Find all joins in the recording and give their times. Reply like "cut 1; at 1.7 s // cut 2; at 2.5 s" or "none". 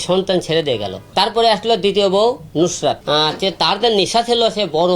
cut 1; at 1.0 s // cut 2; at 3.0 s